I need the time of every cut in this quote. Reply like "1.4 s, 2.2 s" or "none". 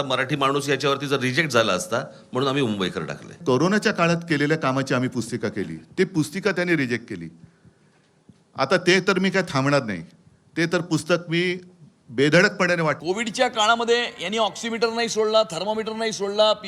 3.2 s, 13.0 s